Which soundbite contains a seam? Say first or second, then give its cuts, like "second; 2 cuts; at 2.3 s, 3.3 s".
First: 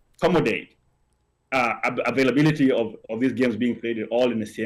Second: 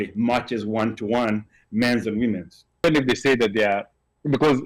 second; 1 cut; at 2.8 s